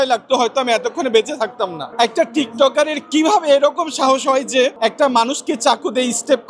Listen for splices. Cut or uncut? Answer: cut